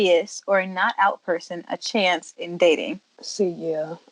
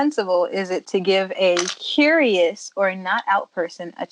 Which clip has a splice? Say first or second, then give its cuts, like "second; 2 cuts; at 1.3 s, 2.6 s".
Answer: first; 1 cut; at 3.0 s